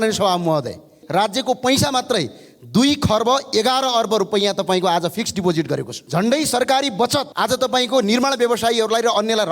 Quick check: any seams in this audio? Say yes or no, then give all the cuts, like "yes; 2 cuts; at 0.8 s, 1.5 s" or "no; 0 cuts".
yes; 3 cuts; at 0.9 s, 6.0 s, 7.3 s